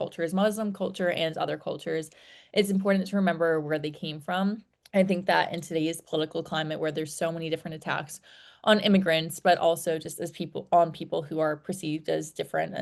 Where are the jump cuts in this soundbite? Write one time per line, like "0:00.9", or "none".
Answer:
none